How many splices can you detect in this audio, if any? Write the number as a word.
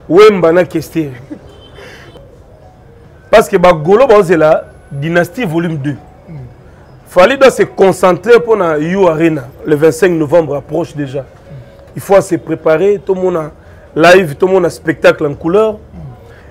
one